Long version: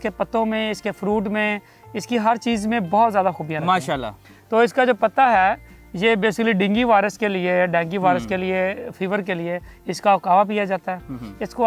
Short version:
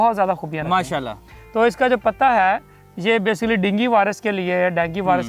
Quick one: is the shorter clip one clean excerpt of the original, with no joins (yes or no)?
yes